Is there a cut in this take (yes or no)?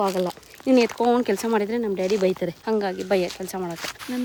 no